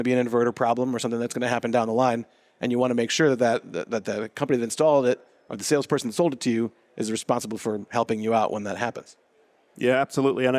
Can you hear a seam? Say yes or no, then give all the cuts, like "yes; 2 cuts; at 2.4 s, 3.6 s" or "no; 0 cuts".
no; 0 cuts